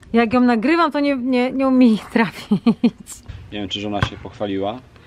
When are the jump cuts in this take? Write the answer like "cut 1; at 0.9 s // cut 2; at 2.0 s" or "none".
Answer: cut 1; at 3.3 s

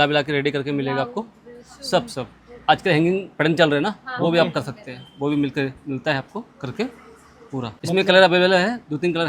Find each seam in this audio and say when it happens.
none

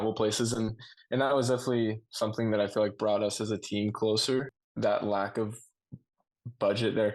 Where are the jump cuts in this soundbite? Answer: cut 1; at 4.5 s

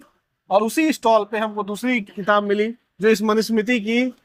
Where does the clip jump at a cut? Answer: none

